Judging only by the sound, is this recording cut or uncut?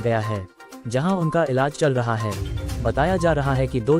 uncut